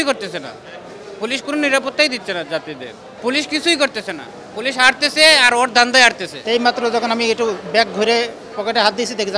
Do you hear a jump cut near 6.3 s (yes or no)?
yes